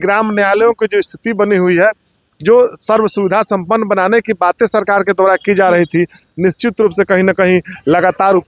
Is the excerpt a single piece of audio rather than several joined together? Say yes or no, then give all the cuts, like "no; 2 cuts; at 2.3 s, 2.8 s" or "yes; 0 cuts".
yes; 0 cuts